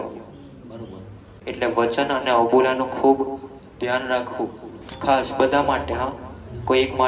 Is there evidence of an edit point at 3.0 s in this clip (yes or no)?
no